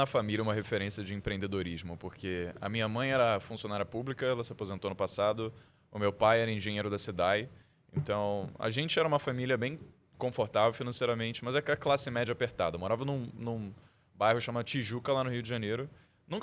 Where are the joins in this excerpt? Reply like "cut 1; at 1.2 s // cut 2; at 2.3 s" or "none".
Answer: none